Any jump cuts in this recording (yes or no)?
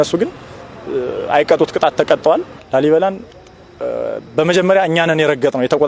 yes